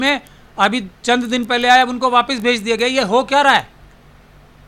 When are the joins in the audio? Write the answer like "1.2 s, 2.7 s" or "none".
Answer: none